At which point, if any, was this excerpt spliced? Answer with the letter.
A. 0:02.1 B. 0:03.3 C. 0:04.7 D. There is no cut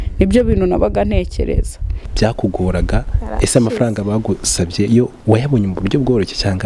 A